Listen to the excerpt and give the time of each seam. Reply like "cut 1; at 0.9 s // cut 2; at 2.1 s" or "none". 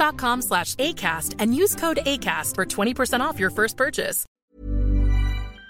cut 1; at 4.2 s